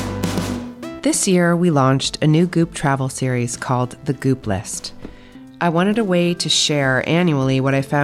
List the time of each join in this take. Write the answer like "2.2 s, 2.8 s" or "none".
0.9 s